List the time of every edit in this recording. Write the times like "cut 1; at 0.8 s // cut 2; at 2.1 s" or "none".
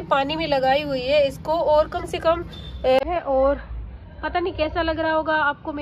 cut 1; at 3.0 s

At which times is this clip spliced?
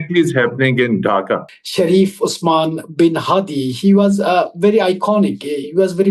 cut 1; at 1.4 s

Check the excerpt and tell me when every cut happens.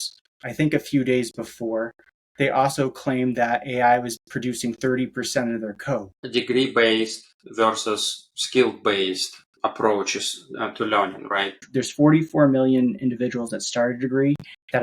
cut 1; at 6.2 s // cut 2; at 11.6 s

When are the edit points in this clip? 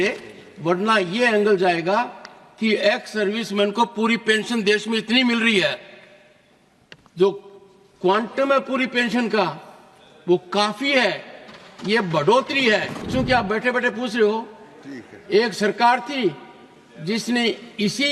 cut 1; at 13.1 s

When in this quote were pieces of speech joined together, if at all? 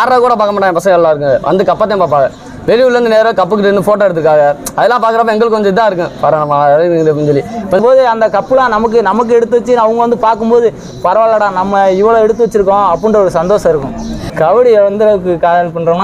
cut 1; at 7.8 s // cut 2; at 14.3 s

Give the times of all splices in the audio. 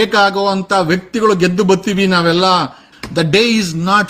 cut 1; at 2.8 s

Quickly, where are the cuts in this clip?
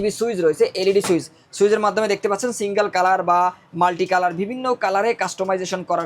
none

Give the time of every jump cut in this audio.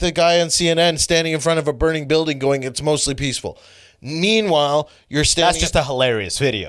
none

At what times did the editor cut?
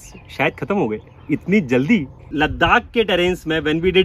cut 1; at 2.3 s

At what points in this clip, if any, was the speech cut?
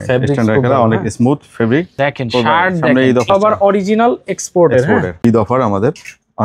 cut 1; at 1.9 s // cut 2; at 3.3 s // cut 3; at 5.2 s

